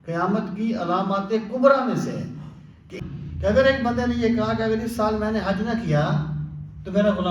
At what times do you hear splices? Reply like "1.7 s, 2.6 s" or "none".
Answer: 3.0 s